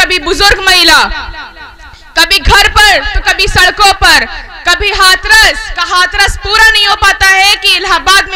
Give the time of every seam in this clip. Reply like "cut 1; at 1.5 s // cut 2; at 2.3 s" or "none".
none